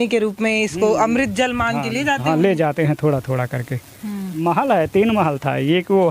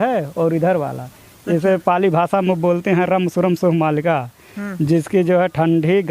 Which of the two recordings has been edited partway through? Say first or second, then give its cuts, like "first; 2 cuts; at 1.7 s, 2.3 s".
first; 1 cut; at 4.3 s